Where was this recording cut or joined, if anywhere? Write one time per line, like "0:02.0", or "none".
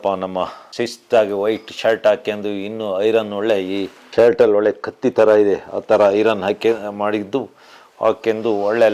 none

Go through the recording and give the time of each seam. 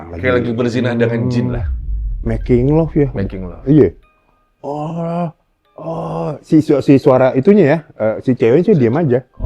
none

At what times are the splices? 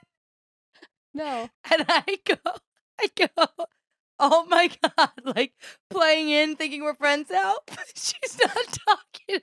none

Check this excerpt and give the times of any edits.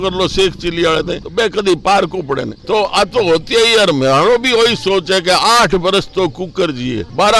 0:02.6

